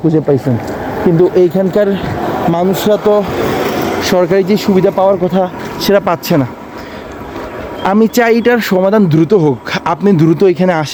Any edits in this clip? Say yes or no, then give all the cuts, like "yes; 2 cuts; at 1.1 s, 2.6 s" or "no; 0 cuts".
no; 0 cuts